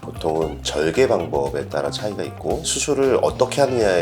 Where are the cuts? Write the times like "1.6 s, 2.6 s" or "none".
2.7 s